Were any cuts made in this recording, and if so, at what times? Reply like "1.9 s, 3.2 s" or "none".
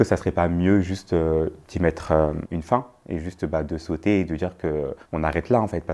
none